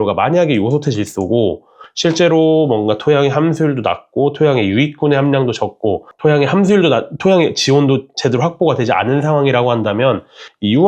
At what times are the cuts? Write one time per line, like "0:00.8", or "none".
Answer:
0:06.1